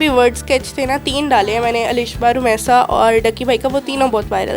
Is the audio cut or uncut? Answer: uncut